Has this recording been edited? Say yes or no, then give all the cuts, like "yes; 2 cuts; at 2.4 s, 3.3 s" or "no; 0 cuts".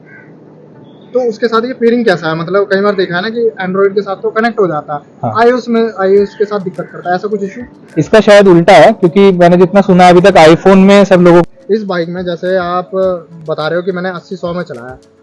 yes; 1 cut; at 11.5 s